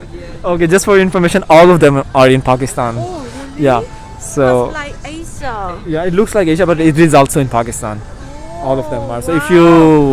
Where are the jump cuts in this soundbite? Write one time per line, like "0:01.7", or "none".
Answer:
none